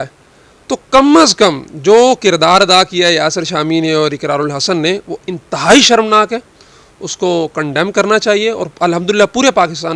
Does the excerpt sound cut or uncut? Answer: uncut